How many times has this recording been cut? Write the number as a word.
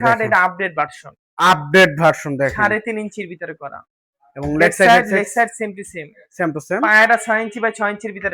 zero